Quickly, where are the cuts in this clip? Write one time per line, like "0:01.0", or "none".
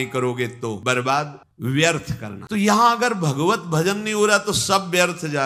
none